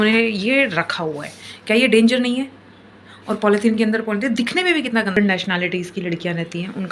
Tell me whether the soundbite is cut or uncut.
cut